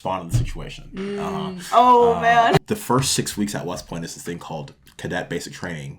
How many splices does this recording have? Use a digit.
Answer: 1